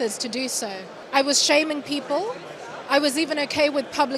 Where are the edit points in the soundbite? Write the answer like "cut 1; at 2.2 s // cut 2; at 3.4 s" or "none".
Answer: none